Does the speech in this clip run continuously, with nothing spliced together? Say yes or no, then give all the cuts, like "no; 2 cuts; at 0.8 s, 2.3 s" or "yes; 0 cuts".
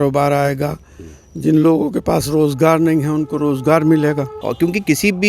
no; 1 cut; at 4.4 s